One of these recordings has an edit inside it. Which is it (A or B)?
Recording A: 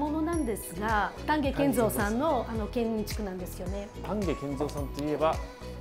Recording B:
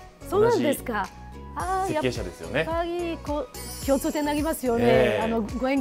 A